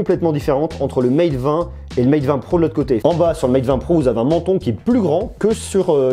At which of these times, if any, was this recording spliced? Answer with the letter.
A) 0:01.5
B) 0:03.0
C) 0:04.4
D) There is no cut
B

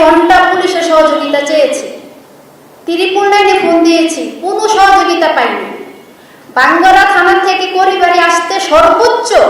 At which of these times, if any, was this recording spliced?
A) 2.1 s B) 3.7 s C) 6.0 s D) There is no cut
D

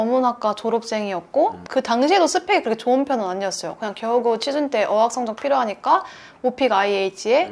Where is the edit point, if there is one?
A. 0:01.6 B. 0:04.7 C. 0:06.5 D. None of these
A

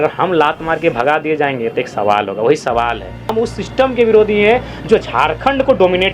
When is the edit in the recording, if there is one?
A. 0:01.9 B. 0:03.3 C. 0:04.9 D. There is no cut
B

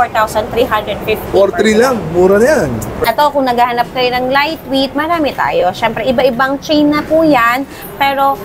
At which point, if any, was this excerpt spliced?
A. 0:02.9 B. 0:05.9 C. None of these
A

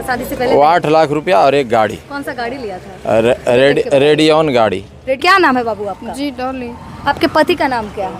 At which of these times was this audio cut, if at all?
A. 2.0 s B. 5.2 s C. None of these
B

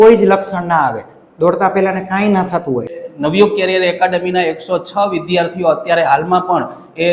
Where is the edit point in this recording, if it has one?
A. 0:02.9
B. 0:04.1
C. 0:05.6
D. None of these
A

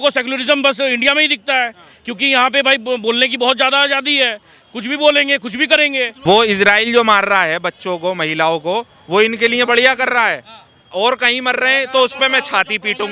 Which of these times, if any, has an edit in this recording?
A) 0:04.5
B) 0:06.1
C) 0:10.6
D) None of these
B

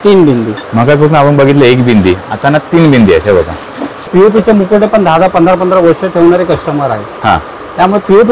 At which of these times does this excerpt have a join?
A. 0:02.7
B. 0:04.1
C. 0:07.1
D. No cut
B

